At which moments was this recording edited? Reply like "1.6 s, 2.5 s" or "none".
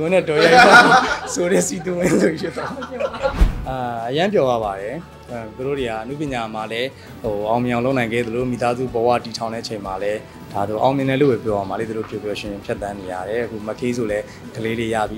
3.4 s

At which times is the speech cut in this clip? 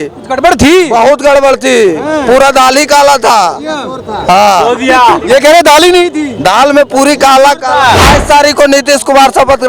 8.0 s

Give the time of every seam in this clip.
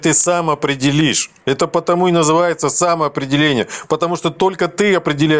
none

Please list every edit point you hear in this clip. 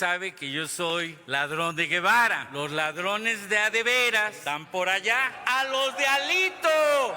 1.2 s, 2.4 s, 4.4 s, 5.4 s

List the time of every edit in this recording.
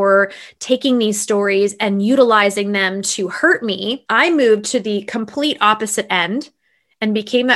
4.0 s

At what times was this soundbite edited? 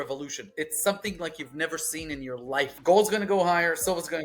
2.8 s

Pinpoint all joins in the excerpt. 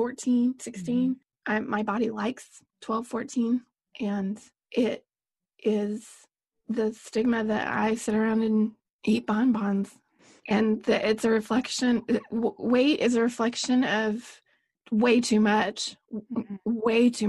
1.3 s, 4.5 s, 8.9 s

